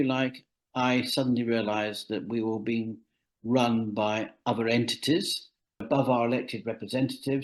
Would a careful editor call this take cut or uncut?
cut